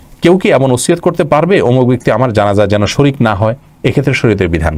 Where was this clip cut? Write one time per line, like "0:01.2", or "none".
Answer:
none